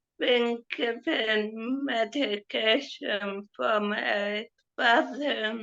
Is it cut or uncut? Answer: cut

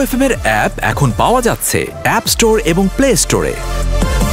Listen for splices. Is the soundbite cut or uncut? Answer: uncut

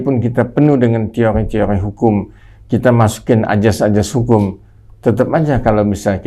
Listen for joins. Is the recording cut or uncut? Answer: uncut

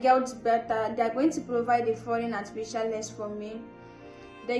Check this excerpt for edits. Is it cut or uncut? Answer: uncut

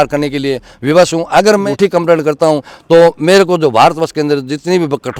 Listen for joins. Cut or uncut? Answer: uncut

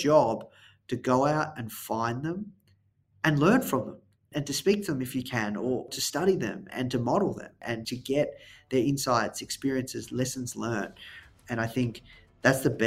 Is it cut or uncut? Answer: cut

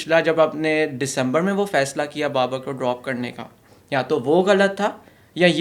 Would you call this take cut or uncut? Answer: uncut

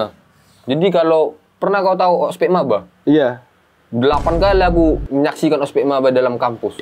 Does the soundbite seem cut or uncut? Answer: uncut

